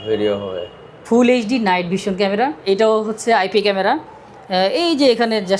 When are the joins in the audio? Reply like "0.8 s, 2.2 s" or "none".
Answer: 2.6 s